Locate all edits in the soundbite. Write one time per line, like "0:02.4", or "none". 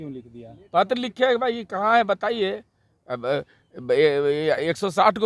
none